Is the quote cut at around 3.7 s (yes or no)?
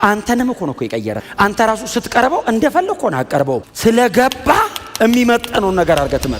yes